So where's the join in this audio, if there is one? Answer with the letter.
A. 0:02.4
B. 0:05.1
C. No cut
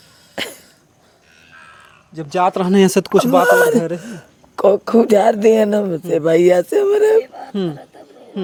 C